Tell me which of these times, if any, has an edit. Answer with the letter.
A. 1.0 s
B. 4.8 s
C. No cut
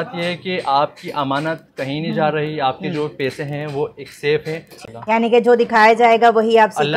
B